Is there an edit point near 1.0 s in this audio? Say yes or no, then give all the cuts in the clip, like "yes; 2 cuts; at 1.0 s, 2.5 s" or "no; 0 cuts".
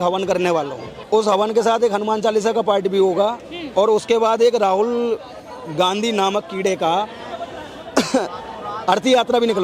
yes; 1 cut; at 1.0 s